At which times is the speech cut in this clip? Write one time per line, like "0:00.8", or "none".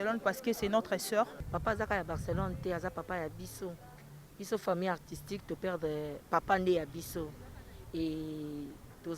0:01.4